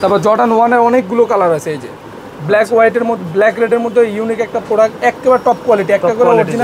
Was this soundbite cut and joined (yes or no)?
no